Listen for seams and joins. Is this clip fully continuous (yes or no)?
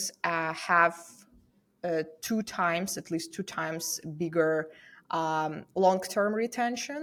yes